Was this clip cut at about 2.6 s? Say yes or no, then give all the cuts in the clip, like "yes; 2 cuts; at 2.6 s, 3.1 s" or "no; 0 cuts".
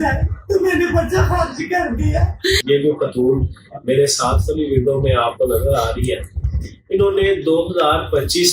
yes; 1 cut; at 2.6 s